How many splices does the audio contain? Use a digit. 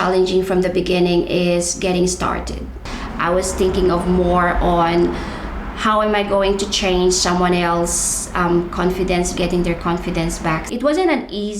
3